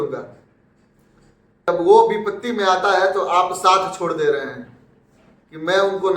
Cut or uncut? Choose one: cut